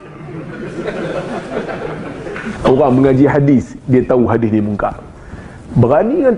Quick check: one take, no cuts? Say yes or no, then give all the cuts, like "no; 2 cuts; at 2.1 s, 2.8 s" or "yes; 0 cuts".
no; 1 cut; at 2.6 s